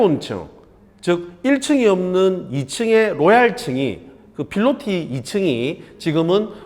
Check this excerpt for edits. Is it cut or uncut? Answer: uncut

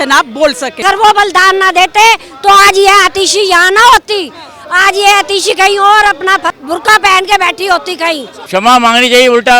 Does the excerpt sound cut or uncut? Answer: cut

